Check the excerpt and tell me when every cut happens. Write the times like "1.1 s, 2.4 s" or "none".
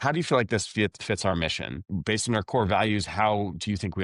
1.9 s